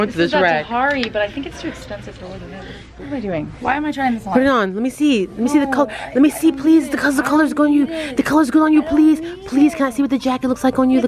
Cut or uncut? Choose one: cut